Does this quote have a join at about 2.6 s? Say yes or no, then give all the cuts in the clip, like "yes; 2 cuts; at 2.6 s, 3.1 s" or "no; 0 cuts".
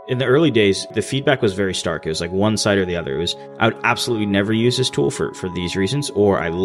no; 1 cut; at 0.9 s